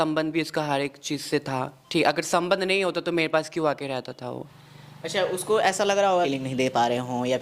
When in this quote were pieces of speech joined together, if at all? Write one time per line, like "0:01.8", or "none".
0:04.5
0:06.3